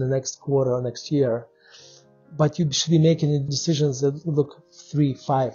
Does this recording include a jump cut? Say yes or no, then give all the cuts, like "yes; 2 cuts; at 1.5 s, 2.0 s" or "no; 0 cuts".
yes; 1 cut; at 3.5 s